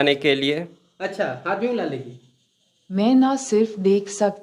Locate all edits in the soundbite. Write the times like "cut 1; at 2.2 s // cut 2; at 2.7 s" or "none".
cut 1; at 2.7 s